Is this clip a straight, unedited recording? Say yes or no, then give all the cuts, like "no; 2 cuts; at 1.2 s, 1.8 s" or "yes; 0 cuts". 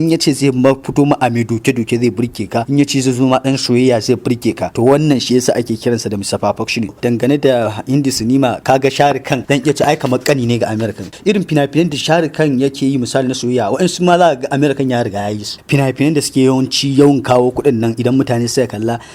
no; 6 cuts; at 2.7 s, 4.7 s, 7.0 s, 9.4 s, 11.1 s, 15.5 s